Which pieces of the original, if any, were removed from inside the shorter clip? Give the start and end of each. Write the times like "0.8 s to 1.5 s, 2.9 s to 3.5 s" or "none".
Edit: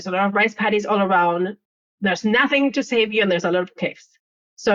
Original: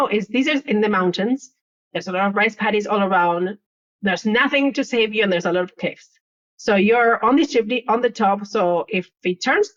none